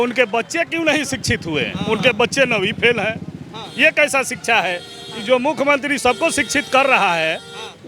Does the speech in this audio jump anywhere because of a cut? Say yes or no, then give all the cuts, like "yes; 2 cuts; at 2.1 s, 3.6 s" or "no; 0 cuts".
yes; 1 cut; at 1.7 s